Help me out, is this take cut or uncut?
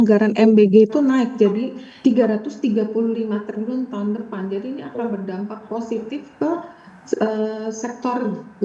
uncut